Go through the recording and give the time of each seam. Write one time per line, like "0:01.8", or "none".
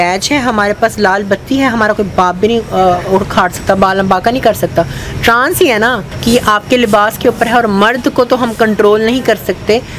0:06.1